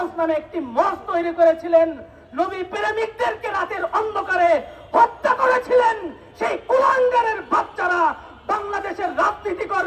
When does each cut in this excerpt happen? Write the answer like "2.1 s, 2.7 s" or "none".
none

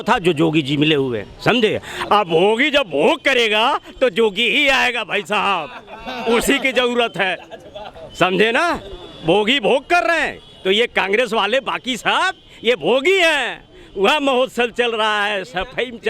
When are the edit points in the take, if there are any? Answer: none

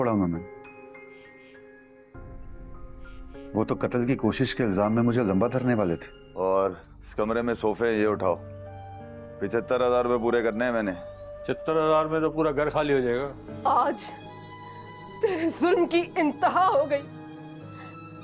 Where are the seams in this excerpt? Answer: 6.2 s, 13.4 s

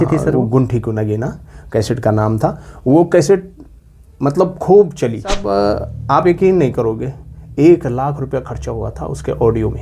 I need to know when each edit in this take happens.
5.4 s

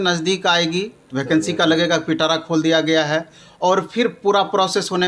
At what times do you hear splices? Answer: none

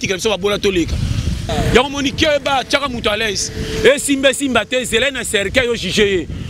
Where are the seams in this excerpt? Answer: 1.4 s

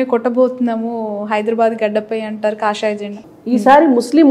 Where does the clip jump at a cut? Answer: 3.3 s

